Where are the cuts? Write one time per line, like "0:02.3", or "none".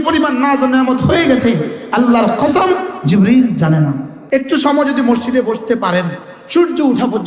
0:04.1